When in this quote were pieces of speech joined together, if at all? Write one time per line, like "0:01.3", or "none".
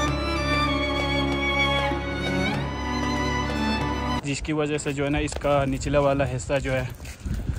0:04.2